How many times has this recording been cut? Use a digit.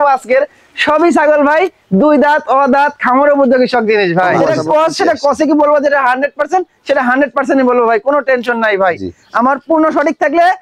1